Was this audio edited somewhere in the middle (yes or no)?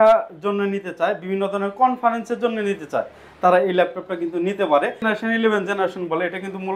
yes